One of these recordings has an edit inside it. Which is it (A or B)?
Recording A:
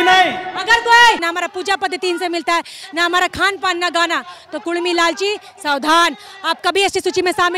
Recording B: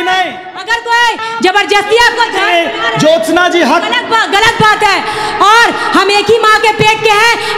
A